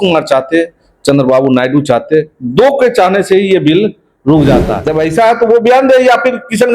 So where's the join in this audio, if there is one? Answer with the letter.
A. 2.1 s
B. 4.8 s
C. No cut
B